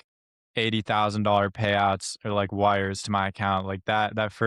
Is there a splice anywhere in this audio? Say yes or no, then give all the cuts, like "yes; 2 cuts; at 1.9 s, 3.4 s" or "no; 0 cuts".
no; 0 cuts